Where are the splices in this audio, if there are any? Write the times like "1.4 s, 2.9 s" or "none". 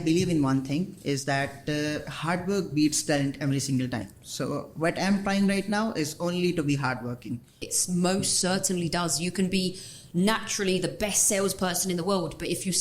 7.7 s